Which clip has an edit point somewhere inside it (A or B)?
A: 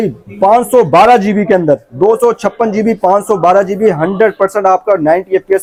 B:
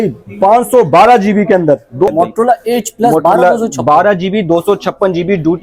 B